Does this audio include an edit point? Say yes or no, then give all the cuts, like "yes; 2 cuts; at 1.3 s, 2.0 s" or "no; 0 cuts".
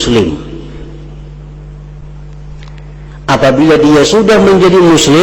no; 0 cuts